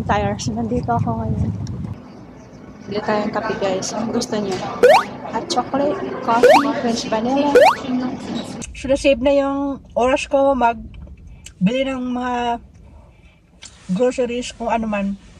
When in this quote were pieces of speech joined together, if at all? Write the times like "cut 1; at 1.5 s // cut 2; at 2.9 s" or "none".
cut 1; at 1.9 s // cut 2; at 8.6 s